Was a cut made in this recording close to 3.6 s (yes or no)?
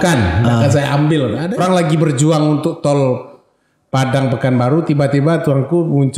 no